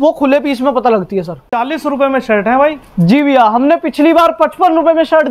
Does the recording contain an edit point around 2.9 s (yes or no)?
no